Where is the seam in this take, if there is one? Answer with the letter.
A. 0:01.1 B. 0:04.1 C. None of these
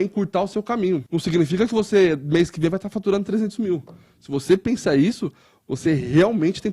A